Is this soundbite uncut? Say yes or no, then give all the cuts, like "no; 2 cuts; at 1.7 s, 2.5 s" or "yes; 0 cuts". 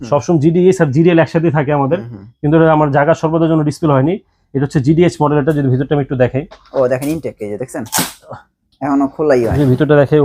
yes; 0 cuts